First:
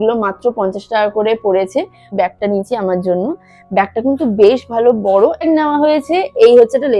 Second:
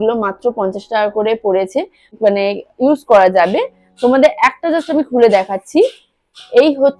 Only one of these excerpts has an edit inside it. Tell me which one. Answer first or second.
first